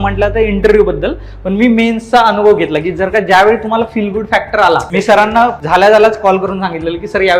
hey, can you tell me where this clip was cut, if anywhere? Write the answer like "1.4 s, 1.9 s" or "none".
4.9 s, 5.6 s